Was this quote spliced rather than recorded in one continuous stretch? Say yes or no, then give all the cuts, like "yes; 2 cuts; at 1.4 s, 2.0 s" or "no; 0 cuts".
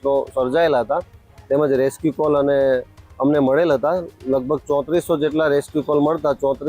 no; 0 cuts